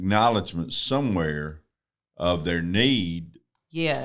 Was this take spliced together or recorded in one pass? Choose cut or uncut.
uncut